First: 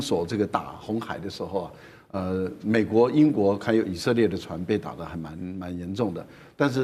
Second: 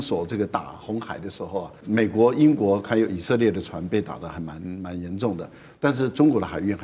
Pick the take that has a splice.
second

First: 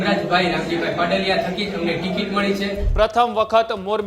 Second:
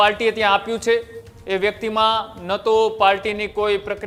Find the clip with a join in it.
first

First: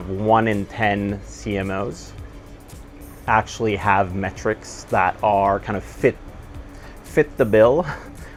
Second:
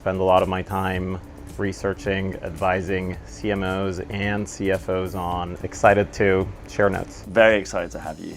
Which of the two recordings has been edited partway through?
second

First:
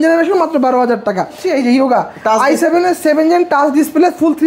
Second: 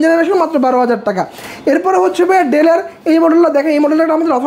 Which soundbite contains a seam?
first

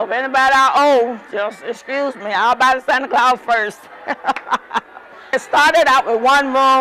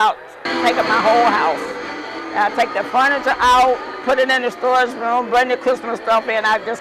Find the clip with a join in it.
first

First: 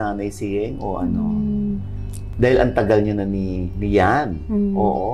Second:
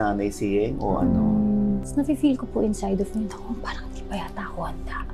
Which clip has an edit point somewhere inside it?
second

